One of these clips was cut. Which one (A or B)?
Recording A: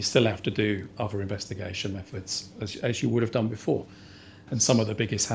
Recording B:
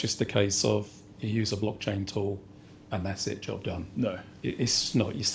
A